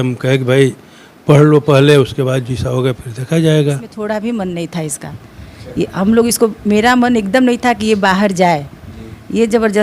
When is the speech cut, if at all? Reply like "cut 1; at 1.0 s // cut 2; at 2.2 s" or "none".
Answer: cut 1; at 3.9 s